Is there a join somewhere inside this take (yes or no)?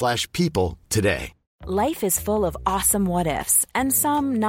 no